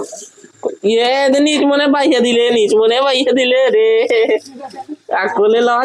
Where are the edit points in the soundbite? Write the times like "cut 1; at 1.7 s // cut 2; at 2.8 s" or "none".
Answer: none